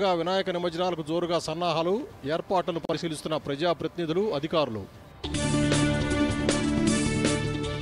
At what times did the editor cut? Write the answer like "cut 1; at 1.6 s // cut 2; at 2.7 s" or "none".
none